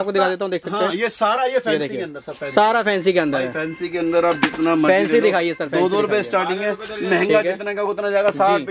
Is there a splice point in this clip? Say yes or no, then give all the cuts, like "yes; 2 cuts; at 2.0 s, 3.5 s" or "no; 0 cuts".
no; 0 cuts